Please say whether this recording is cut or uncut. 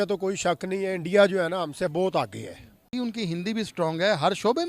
cut